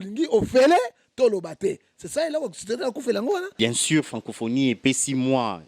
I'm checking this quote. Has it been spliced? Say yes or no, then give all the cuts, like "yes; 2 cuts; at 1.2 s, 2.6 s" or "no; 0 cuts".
yes; 1 cut; at 3.5 s